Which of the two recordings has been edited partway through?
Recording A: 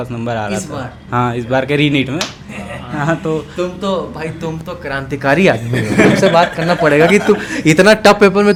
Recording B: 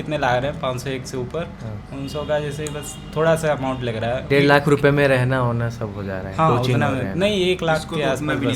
B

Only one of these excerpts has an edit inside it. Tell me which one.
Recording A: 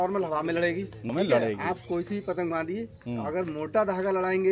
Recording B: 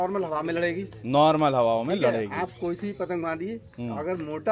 A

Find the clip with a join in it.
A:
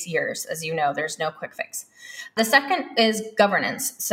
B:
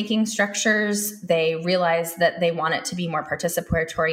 A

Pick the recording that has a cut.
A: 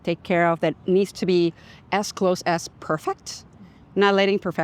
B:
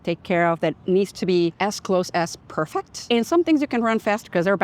B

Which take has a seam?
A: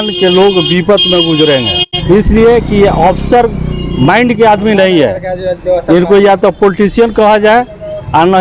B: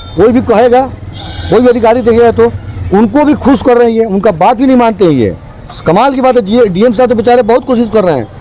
A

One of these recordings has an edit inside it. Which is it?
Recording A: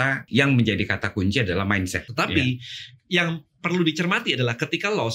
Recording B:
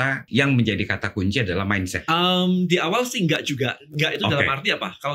A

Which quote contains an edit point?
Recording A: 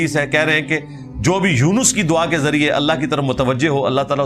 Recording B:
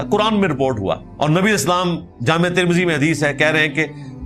B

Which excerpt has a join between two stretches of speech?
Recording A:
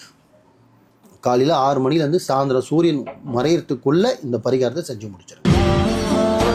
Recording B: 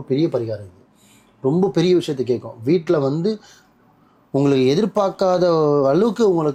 A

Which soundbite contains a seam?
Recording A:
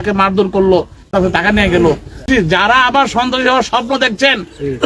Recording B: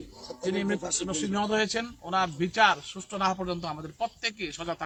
A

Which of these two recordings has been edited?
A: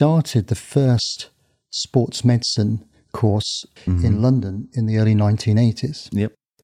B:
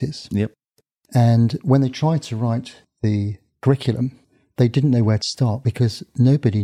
A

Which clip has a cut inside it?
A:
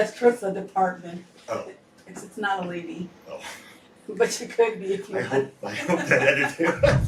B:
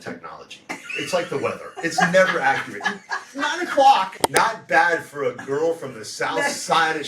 B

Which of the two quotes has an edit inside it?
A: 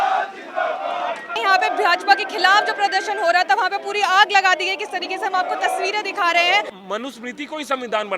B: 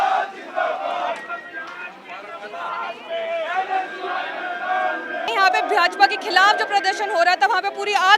A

